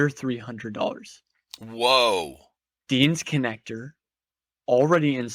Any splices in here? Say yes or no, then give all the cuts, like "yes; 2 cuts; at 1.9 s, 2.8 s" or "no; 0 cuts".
no; 0 cuts